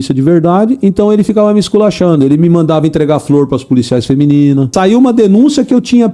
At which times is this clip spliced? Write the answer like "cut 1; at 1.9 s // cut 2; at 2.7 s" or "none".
cut 1; at 4.7 s